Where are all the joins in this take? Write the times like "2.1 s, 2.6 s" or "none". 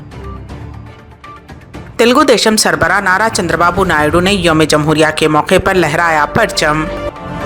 1.8 s

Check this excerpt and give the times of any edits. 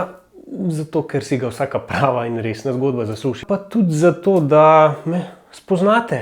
3.4 s

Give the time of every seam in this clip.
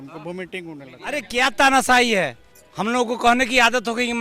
1.2 s

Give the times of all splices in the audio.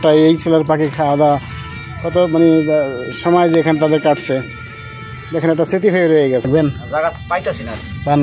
6.4 s

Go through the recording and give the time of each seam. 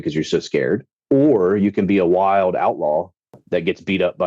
0.9 s, 3.3 s

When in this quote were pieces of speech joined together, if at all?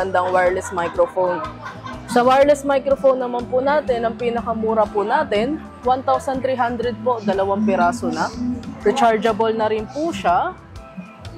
none

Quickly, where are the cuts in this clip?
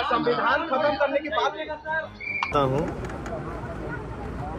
2.5 s

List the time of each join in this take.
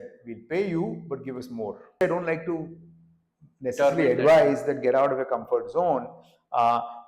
2.0 s

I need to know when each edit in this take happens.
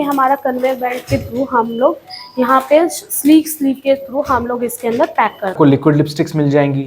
5.5 s

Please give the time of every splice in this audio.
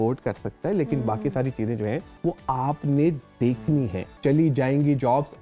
2.1 s, 4.1 s

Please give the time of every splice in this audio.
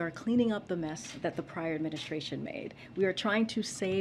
2.8 s

